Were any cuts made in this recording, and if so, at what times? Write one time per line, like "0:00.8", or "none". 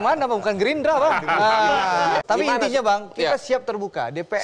0:02.2

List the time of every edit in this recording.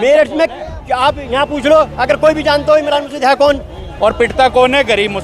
0:03.8

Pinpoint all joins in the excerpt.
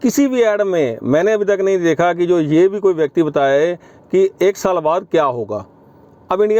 none

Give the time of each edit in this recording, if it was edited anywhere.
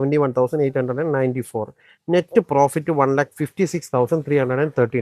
none

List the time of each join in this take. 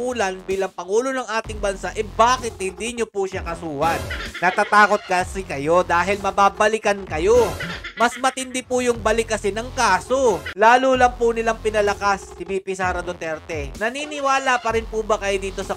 0:10.5
0:13.7

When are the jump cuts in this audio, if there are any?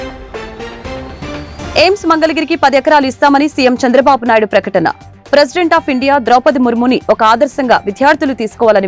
0:01.7

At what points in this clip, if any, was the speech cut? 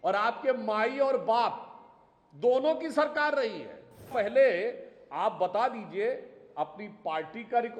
0:04.1

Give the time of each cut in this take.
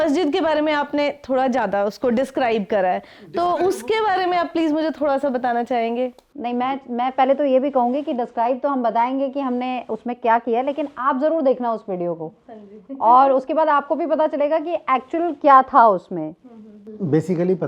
none

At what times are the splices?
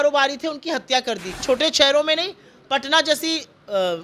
0:01.4

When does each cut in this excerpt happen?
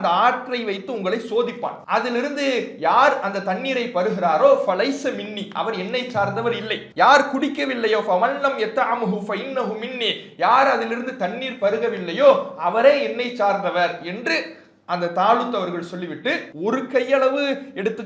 0:01.8
0:06.8

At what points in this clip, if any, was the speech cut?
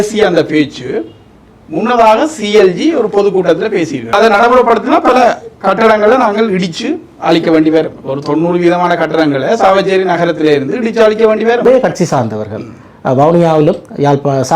0:04.1
0:11.6

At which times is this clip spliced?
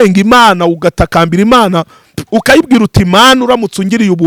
none

